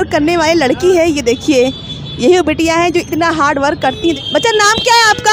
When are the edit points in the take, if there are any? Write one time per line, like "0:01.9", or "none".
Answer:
0:04.2